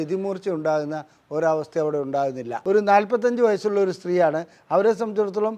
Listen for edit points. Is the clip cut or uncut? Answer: cut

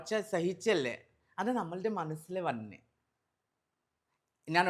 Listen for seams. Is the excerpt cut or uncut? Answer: uncut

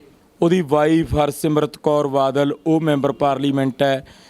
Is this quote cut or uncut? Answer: uncut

